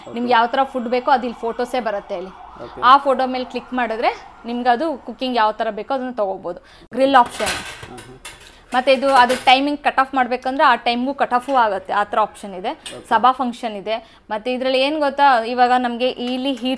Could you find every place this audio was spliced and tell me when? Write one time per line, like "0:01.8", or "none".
none